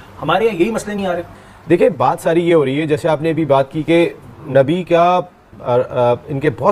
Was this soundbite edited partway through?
no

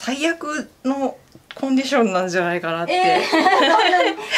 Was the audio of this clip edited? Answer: no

